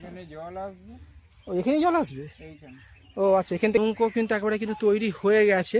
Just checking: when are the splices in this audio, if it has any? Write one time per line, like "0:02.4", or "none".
0:03.8